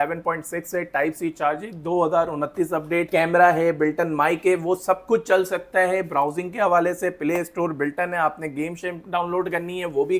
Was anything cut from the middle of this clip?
no; 0 cuts

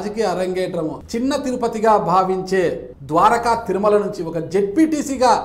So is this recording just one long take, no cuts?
no; 2 cuts; at 1.0 s, 2.9 s

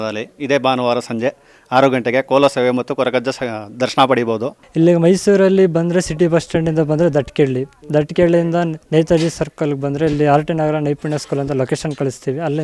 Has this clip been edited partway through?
yes; 2 cuts; at 4.6 s, 8.8 s

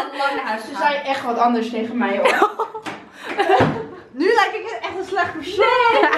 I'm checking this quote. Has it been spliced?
no; 0 cuts

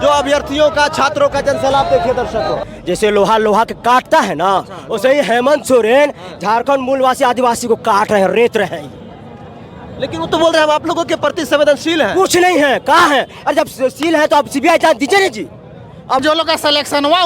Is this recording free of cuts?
no; 2 cuts; at 2.7 s, 16.2 s

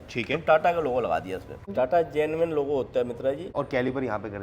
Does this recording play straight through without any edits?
no; 2 cuts; at 1.7 s, 3.5 s

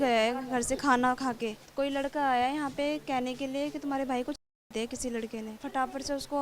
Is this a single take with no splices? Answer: no; 3 cuts; at 1.6 s, 4.5 s, 5.6 s

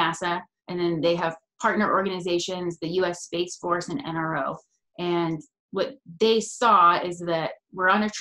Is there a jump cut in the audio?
no; 0 cuts

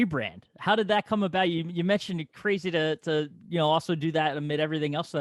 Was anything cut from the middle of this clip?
no; 0 cuts

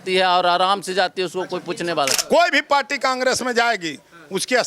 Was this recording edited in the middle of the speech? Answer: yes; 1 cut; at 2.2 s

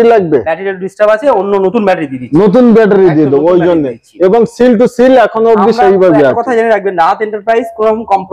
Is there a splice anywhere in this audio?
no; 0 cuts

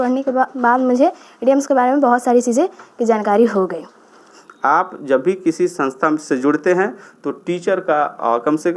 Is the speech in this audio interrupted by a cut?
yes; 1 cut; at 4.3 s

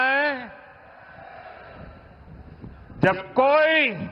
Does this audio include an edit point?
no; 0 cuts

